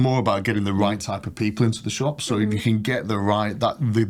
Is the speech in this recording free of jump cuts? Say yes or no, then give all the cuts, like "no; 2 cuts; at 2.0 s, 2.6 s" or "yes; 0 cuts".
yes; 0 cuts